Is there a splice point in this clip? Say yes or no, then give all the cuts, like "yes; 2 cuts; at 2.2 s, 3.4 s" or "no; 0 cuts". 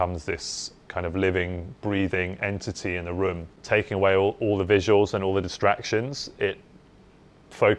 yes; 1 cut; at 3.5 s